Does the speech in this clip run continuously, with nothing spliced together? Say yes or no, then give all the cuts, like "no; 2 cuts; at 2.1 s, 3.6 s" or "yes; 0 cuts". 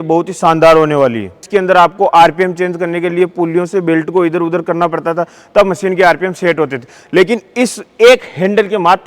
no; 1 cut; at 1.4 s